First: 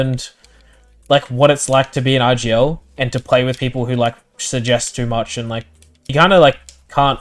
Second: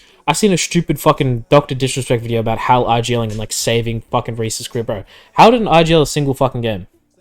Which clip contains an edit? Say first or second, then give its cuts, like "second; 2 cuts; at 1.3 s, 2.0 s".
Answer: first; 1 cut; at 6.0 s